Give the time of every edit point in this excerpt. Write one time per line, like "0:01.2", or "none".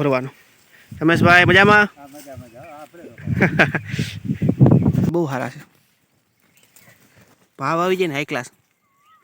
0:05.1